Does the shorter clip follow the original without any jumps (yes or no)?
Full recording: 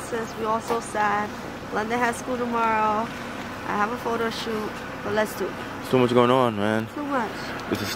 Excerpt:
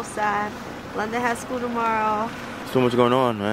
no